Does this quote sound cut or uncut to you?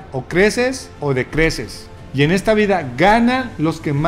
uncut